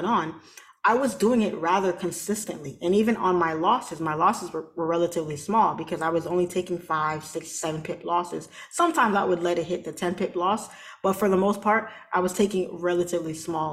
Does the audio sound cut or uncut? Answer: uncut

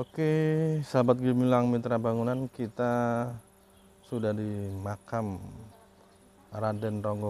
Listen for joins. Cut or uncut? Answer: uncut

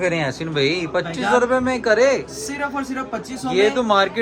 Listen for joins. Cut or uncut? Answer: uncut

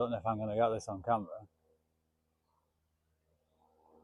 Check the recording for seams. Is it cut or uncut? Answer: uncut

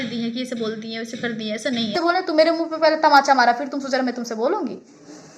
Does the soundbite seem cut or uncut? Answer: cut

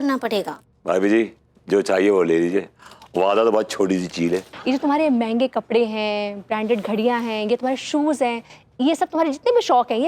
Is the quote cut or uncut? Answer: cut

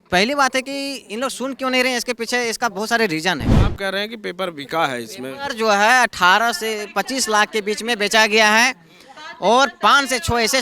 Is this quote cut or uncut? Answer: cut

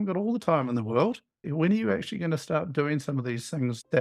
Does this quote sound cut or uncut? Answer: uncut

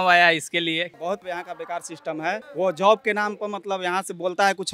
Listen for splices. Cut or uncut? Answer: cut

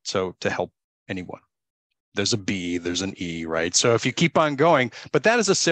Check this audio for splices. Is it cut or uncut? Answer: uncut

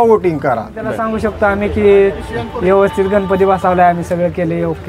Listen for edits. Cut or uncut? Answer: cut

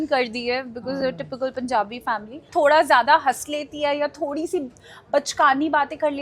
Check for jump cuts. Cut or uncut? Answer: cut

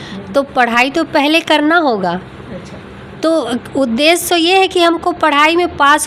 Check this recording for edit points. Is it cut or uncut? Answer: uncut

